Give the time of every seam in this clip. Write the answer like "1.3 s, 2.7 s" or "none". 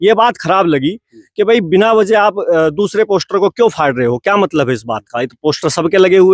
none